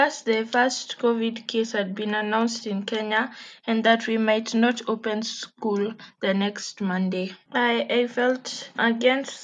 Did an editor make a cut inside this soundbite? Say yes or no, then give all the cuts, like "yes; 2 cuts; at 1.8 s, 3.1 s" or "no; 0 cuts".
no; 0 cuts